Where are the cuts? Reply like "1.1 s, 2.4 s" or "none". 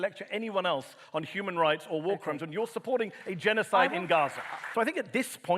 4.6 s